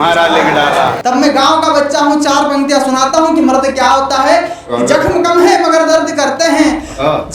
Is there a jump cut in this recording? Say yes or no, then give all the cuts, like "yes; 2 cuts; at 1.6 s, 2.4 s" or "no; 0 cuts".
yes; 1 cut; at 1.0 s